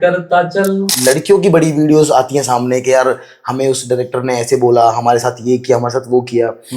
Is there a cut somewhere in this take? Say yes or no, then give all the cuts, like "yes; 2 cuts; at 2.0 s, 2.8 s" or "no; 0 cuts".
yes; 1 cut; at 0.9 s